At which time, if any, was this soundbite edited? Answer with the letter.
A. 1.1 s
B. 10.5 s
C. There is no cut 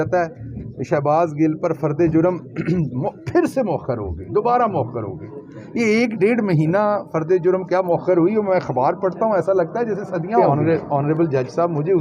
B